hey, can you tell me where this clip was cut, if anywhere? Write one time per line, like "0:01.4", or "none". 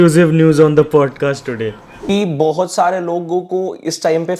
0:01.9